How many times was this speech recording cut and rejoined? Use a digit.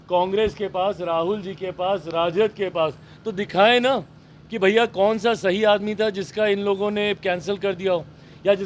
0